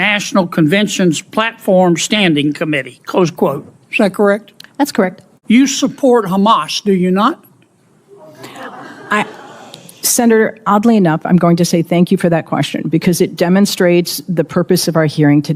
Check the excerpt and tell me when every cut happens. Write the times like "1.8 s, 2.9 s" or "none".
5.3 s